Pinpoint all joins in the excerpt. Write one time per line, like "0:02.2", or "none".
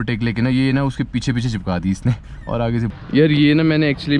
0:03.0